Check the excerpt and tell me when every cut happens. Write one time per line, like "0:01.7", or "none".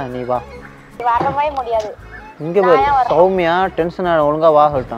0:00.9